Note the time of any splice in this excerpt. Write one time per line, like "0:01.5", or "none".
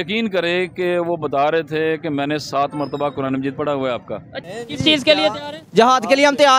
0:04.3